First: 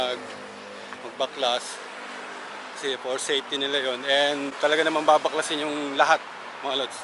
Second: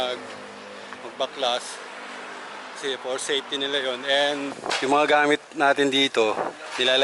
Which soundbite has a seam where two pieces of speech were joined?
second; 1 cut; at 4.5 s

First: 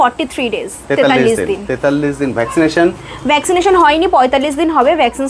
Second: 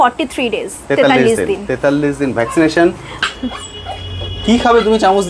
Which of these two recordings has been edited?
second; 1 cut; at 3.1 s

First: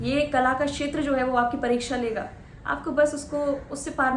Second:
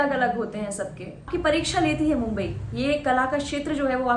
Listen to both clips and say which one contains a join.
second; 1 cut; at 1.3 s

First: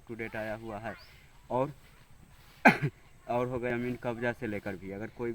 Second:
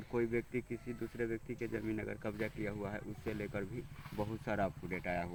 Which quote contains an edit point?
first; 1 cut; at 3.7 s

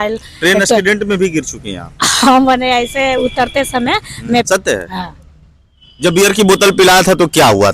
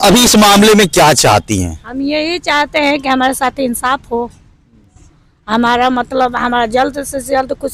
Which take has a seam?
first; 1 cut; at 4.5 s

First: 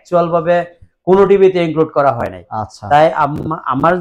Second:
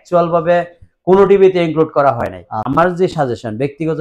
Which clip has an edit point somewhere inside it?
second; 1 cut; at 2.6 s

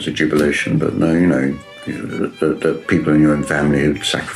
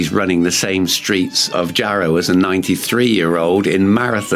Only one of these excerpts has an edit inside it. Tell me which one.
second; 1 cut; at 1.5 s

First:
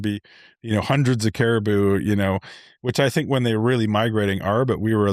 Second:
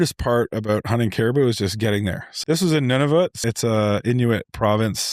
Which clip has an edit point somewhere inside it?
second; 2 cuts; at 2.3 s, 3.4 s

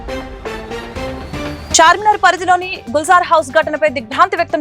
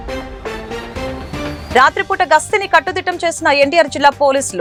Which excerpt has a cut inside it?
first; 1 cut; at 1.4 s

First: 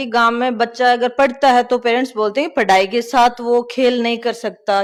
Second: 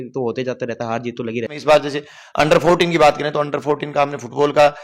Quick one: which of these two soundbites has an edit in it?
second; 1 cut; at 1.5 s

